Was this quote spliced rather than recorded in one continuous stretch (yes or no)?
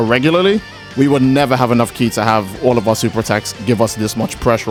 no